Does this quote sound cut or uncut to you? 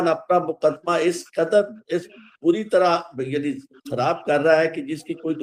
uncut